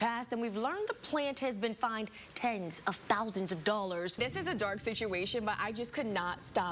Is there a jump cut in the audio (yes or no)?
yes